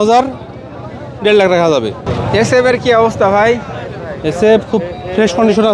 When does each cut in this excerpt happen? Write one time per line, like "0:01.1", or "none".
0:02.1